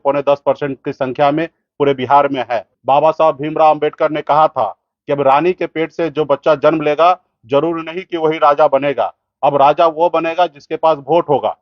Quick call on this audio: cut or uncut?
cut